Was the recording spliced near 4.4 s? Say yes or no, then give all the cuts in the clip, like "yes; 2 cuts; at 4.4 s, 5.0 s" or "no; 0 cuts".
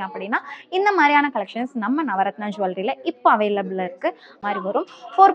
yes; 1 cut; at 4.4 s